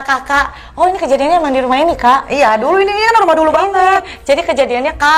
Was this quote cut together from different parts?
no; 0 cuts

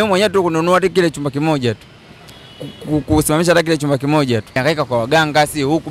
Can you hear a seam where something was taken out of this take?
yes; 1 cut; at 4.6 s

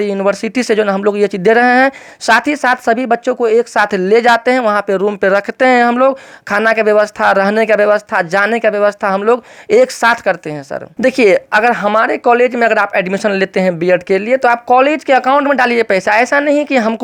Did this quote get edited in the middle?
no; 0 cuts

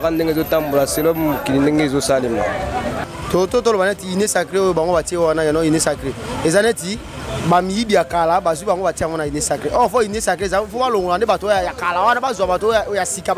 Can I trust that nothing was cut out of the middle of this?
no; 1 cut; at 3.0 s

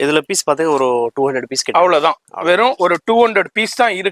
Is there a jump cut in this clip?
no; 0 cuts

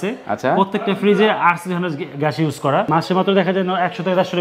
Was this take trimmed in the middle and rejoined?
yes; 1 cut; at 2.9 s

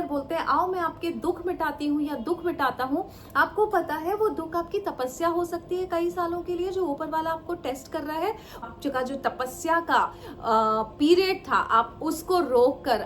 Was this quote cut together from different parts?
yes; 1 cut; at 8.6 s

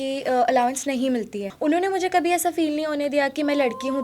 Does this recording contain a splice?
yes; 1 cut; at 1.4 s

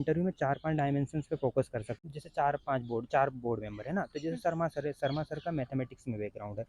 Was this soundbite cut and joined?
yes; 1 cut; at 2.0 s

